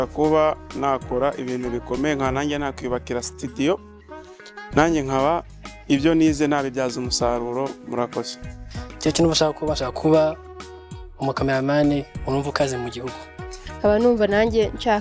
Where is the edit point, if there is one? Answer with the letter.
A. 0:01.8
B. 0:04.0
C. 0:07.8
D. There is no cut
B